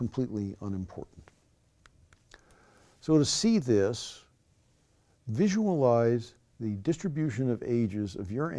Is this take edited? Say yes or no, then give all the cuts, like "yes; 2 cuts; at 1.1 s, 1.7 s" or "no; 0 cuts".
yes; 1 cut; at 4.6 s